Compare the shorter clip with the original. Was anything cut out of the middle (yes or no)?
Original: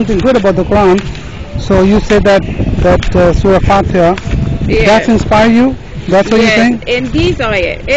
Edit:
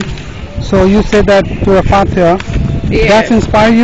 yes